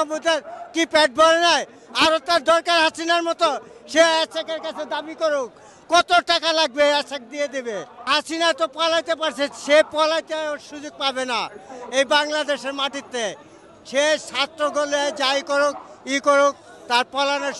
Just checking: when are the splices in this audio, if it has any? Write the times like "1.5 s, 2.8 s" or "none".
none